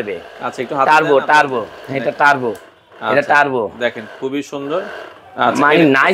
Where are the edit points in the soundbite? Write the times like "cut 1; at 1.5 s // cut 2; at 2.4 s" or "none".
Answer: none